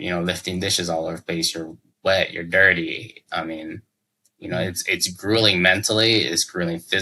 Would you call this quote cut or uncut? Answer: uncut